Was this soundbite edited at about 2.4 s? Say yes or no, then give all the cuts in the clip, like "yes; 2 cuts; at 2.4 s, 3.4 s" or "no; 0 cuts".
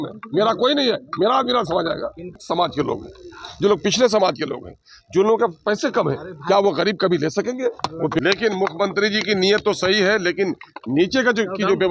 yes; 2 cuts; at 2.4 s, 8.2 s